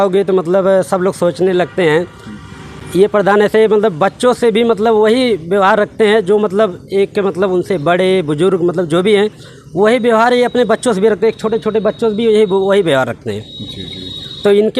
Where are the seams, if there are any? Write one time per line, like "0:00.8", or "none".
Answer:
none